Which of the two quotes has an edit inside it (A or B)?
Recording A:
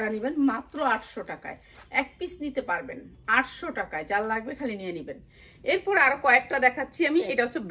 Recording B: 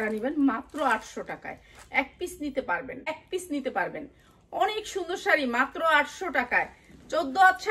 B